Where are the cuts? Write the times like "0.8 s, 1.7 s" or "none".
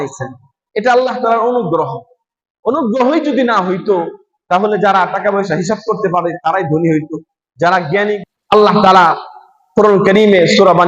8.2 s